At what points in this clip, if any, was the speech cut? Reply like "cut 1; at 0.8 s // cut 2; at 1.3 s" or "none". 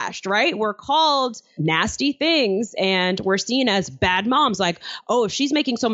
cut 1; at 1.6 s